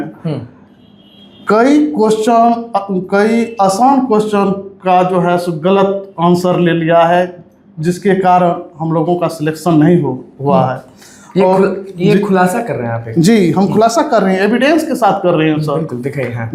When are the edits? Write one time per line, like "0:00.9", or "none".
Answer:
none